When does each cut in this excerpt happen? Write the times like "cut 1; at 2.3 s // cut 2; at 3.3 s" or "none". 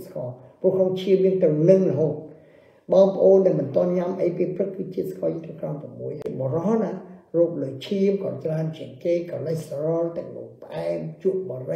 cut 1; at 6.2 s